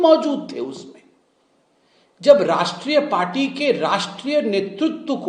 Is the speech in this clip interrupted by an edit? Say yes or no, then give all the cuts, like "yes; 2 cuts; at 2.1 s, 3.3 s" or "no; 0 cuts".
no; 0 cuts